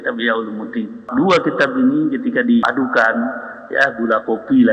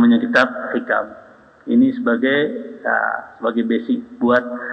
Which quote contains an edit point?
first; 2 cuts; at 1.0 s, 2.6 s

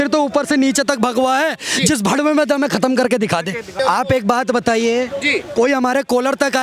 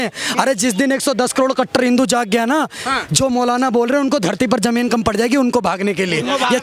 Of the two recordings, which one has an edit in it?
first; 1 cut; at 3.7 s

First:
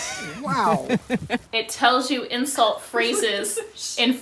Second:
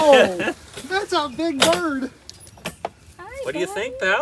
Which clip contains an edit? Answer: first; 1 cut; at 1.5 s

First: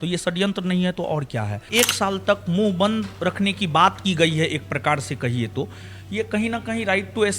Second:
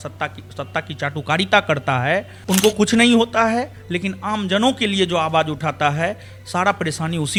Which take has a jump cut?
first; 1 cut; at 1.7 s

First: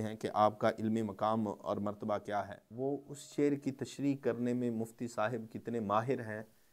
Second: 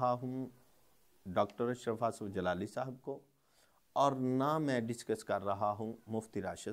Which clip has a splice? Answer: first; 1 cut; at 2.6 s

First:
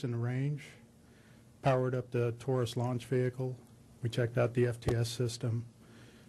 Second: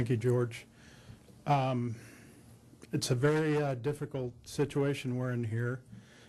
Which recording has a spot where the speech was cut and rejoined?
first; 1 cut; at 4.7 s

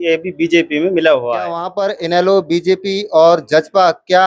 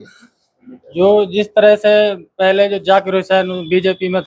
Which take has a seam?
first; 1 cut; at 1.7 s

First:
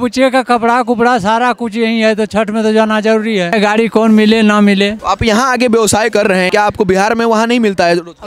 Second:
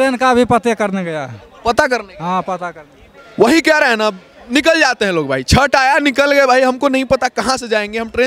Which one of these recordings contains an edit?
first; 3 cuts; at 3.5 s, 5.0 s, 6.5 s

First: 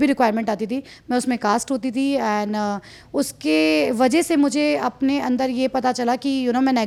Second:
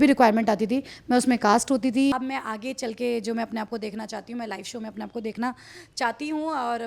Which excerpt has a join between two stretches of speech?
second; 1 cut; at 2.1 s

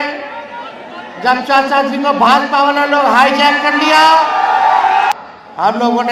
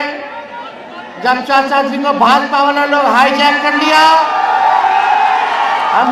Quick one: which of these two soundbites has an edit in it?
first; 1 cut; at 5.1 s

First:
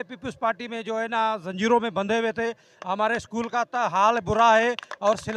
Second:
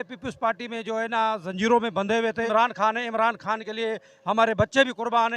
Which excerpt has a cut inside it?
second; 1 cut; at 2.5 s

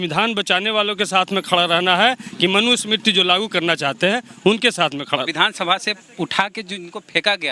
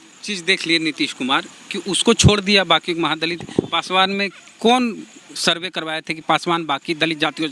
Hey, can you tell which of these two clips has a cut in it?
first; 1 cut; at 5.3 s

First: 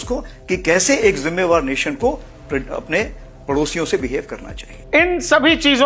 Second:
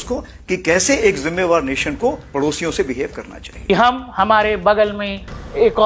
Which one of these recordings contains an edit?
second; 2 cuts; at 2.2 s, 3.7 s

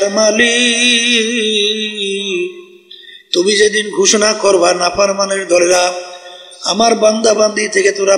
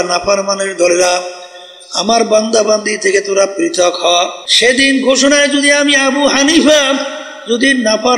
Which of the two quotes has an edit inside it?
second; 1 cut; at 4.4 s

